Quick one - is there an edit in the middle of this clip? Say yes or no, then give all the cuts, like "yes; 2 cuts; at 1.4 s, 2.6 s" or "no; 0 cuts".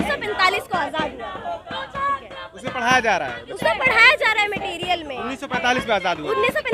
no; 0 cuts